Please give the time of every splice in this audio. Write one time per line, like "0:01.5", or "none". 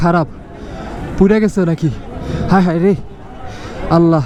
none